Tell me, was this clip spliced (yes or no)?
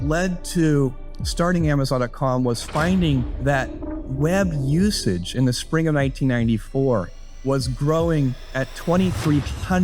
no